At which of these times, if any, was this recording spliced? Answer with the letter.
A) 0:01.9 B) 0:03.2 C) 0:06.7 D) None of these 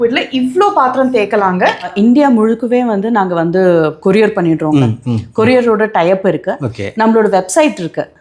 A